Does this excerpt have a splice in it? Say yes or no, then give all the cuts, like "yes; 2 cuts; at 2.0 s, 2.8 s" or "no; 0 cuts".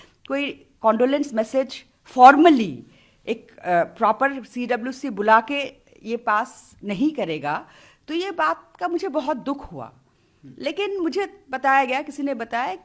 no; 0 cuts